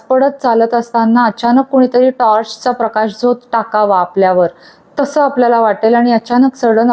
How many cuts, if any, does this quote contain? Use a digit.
0